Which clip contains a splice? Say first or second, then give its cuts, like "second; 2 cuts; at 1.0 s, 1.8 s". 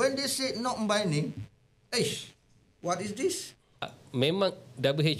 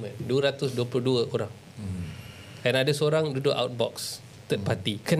first; 1 cut; at 4.0 s